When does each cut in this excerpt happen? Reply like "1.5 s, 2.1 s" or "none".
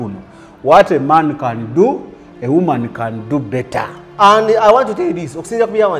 none

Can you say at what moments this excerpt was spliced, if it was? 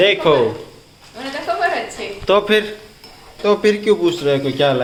none

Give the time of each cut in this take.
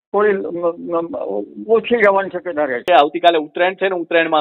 2.8 s

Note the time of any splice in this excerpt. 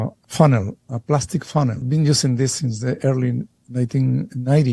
1.8 s

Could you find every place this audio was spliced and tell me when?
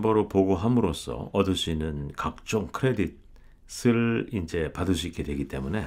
none

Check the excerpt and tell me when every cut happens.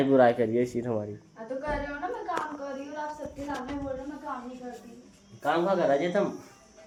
none

